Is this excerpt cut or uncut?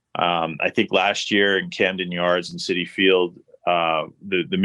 uncut